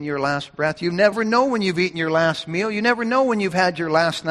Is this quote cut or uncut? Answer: cut